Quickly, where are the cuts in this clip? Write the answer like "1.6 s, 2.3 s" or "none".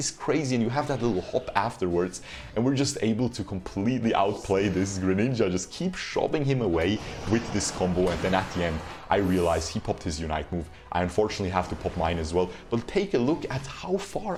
none